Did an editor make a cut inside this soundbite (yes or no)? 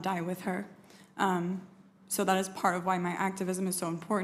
no